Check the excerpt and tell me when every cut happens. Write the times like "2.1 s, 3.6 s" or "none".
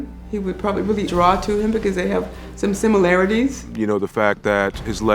1.1 s, 3.7 s